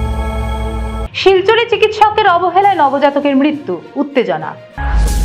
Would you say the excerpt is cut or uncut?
cut